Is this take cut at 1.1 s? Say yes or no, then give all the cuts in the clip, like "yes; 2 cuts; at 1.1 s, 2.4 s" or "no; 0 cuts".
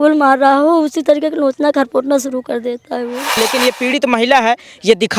no; 1 cut; at 3.4 s